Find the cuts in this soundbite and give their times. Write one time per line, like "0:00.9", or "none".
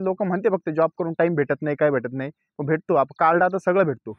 none

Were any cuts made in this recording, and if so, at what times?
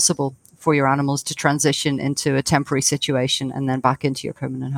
none

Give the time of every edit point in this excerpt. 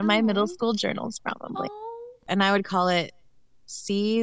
0:02.2

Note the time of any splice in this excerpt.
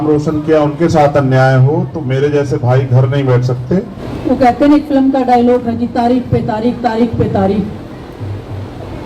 0:04.0

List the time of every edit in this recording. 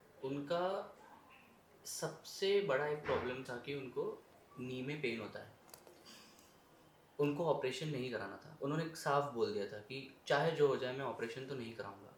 none

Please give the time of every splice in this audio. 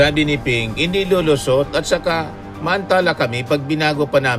none

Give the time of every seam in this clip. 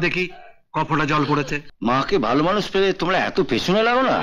0:01.6

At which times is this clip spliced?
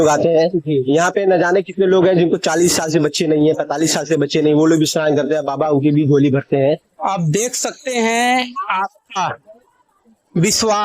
0:06.8

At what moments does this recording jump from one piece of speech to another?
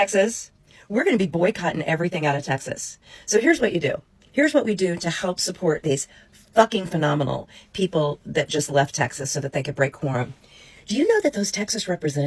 none

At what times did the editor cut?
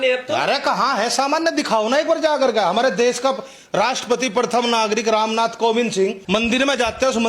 0:06.2

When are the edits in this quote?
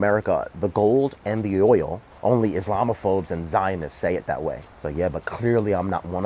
0:02.1
0:04.7

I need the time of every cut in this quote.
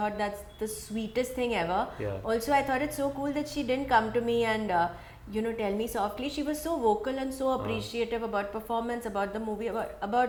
none

